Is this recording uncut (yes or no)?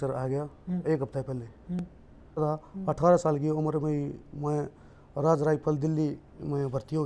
no